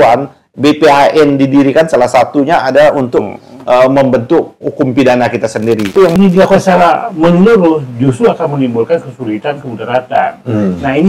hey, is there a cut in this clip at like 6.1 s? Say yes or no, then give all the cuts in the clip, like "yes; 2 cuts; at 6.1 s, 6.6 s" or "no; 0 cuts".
yes; 1 cut; at 6.1 s